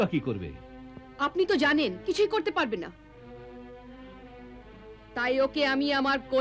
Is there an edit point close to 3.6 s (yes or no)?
no